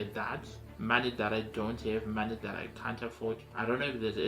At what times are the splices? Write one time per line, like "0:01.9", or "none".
0:03.3